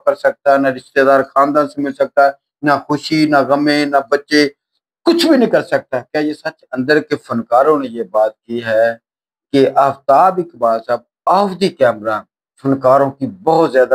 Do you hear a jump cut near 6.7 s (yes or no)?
yes